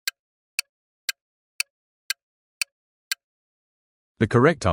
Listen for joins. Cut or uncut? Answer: cut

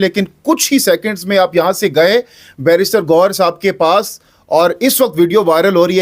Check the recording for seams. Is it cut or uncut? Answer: uncut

